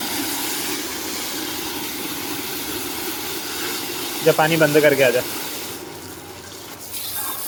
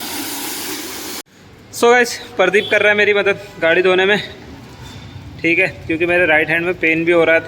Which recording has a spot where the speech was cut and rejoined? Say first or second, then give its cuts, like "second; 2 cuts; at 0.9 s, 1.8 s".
second; 1 cut; at 1.2 s